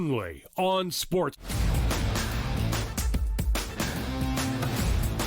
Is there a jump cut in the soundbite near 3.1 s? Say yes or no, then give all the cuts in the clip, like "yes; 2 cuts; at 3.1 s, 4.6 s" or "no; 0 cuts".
no; 1 cut; at 1.4 s